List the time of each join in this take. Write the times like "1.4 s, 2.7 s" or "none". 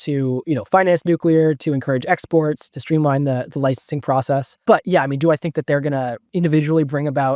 2.7 s, 4.6 s, 6.2 s